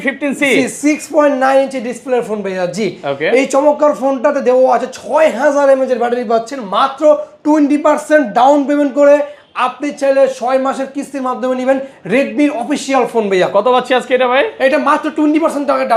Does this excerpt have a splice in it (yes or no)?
no